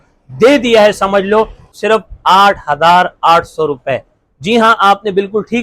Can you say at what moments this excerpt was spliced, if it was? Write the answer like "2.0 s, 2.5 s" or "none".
1.7 s